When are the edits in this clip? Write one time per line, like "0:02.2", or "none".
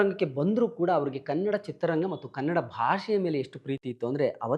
none